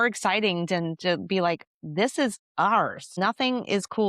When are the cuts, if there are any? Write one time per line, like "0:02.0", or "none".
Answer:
0:03.1